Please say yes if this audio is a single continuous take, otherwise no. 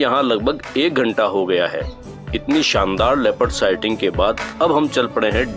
yes